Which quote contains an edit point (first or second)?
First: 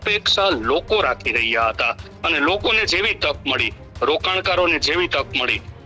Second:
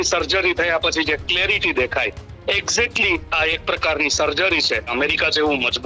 second